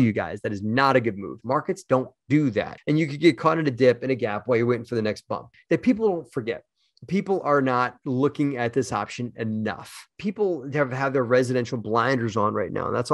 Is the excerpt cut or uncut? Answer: cut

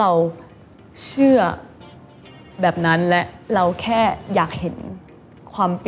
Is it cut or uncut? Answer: uncut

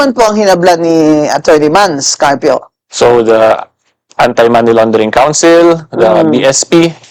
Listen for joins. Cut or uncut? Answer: uncut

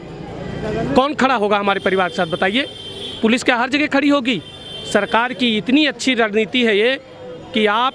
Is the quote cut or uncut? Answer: uncut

